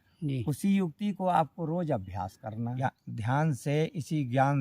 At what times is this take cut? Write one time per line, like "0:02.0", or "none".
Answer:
0:03.3